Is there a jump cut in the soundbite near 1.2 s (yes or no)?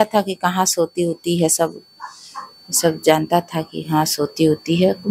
no